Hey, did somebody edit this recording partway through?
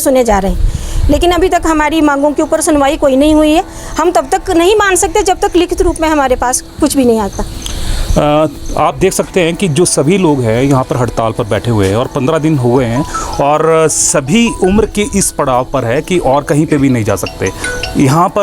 no; 0 cuts

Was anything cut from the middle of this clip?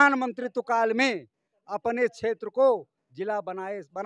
no; 0 cuts

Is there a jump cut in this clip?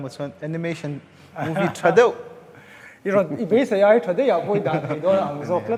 no; 0 cuts

